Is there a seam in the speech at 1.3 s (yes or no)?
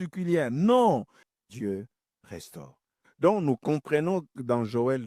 yes